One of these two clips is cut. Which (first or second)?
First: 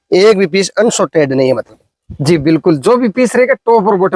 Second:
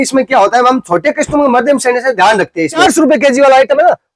second